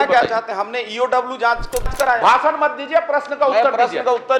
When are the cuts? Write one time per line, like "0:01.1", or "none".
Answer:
0:01.8